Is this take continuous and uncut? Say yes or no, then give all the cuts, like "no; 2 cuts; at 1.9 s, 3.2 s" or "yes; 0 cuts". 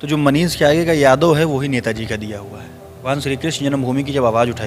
no; 1 cut; at 3.0 s